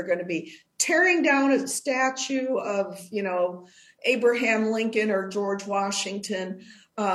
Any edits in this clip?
no; 0 cuts

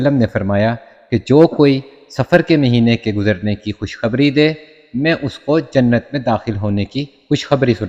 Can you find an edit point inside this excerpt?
no; 0 cuts

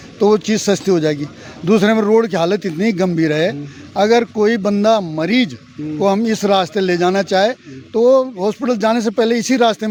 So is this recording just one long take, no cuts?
yes; 0 cuts

